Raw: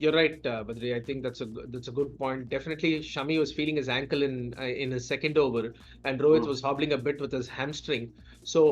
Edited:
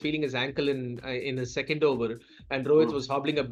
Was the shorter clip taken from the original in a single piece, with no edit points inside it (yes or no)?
yes